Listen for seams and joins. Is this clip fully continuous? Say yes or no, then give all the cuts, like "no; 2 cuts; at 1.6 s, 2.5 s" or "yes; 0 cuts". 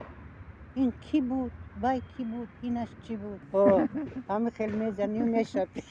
no; 1 cut; at 3.4 s